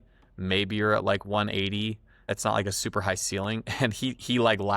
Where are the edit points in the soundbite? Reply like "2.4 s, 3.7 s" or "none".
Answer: 2.2 s